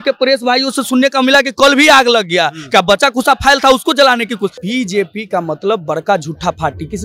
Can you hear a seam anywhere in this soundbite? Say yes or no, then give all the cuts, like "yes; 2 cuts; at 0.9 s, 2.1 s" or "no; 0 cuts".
yes; 1 cut; at 4.6 s